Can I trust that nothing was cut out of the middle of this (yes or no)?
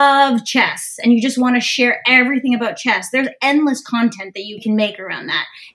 no